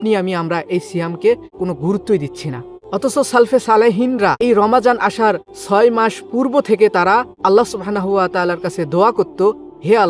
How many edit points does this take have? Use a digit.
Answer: 5